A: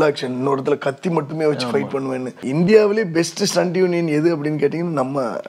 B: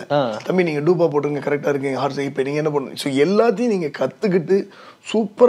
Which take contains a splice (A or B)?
A